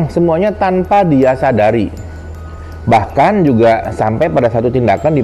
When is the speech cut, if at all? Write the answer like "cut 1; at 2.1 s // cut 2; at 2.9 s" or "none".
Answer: none

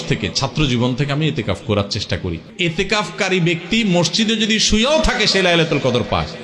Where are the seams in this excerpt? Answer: cut 1; at 2.5 s

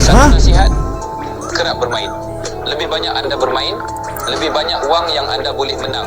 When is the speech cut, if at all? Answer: none

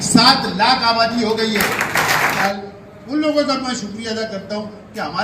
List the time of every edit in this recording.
cut 1; at 2.4 s

